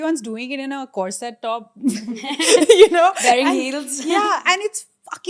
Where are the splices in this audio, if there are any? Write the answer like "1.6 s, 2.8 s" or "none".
none